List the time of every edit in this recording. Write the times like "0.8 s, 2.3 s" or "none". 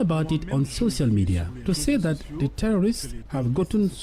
none